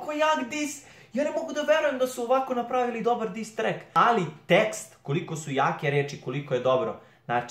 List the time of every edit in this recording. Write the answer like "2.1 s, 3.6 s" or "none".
3.8 s